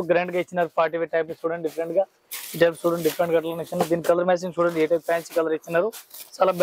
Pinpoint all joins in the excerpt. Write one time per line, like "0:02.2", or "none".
none